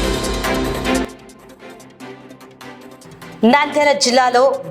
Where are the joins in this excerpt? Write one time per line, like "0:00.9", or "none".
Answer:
0:01.0
0:03.0

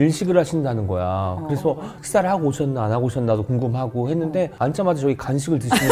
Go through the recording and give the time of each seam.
0:01.9
0:04.5

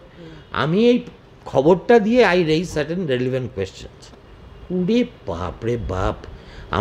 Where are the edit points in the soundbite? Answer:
none

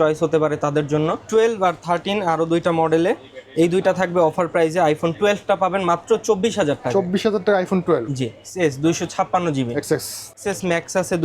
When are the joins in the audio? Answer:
0:01.2
0:08.4
0:10.3

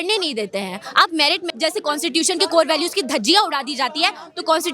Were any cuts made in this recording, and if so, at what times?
0:01.5

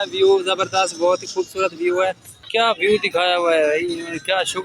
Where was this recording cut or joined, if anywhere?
0:02.5

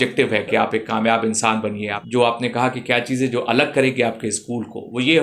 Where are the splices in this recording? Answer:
0:02.0

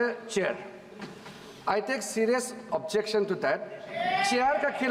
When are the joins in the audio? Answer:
none

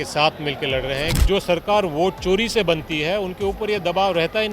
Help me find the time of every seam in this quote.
0:01.1

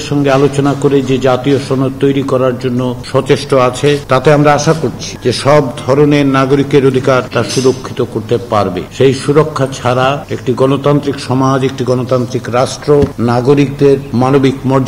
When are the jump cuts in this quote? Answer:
0:03.0
0:04.0
0:05.1
0:07.3
0:08.9
0:10.3
0:13.1
0:14.1

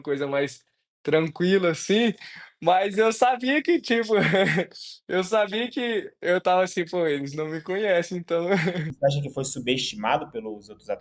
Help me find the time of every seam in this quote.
0:08.9

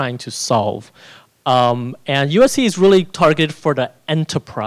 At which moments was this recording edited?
none

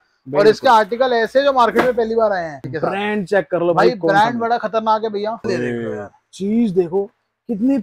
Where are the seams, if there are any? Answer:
0:02.7
0:05.5

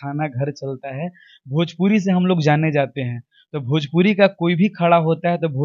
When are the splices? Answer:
none

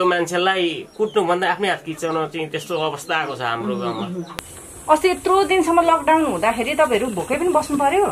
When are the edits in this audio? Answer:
0:04.4

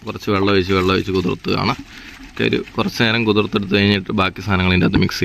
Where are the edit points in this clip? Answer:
none

